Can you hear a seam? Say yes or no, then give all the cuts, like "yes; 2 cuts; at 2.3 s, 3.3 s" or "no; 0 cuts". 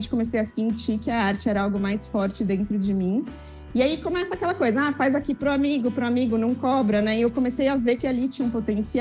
no; 0 cuts